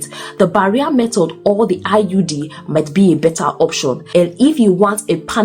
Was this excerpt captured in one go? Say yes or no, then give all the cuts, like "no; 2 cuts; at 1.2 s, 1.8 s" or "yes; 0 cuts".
no; 1 cut; at 4.0 s